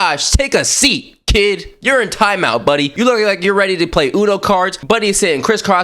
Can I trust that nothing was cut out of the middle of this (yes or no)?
yes